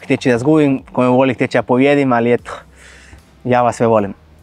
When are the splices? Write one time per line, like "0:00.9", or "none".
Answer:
none